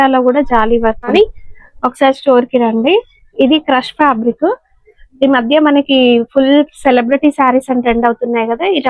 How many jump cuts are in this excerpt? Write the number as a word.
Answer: one